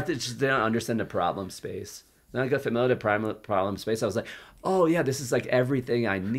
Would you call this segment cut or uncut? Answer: uncut